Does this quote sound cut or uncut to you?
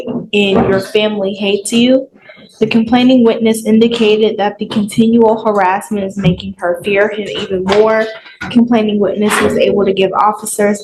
uncut